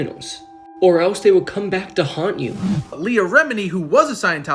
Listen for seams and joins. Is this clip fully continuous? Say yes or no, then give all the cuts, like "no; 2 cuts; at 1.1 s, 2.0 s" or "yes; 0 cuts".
no; 1 cut; at 2.8 s